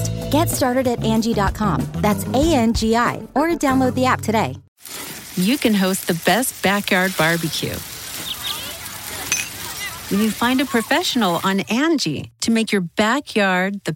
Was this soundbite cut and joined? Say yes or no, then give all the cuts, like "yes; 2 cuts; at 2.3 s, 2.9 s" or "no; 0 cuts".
yes; 1 cut; at 4.6 s